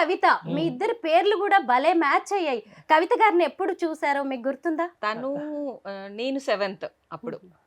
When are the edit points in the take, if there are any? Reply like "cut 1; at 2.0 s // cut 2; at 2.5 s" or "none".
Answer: cut 1; at 5.0 s